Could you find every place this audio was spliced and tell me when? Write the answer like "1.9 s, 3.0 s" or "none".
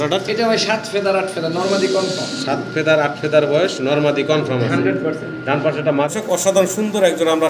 6.1 s